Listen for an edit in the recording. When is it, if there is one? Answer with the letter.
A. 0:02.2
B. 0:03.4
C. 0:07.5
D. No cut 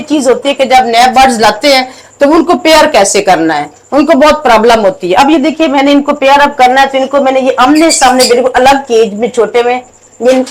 D